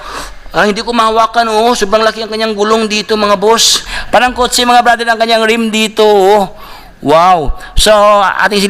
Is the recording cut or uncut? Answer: cut